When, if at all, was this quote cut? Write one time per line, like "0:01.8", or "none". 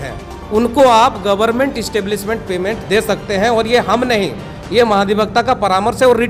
none